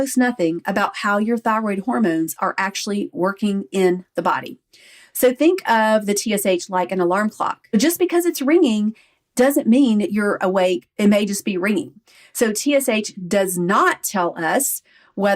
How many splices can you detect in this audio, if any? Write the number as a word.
two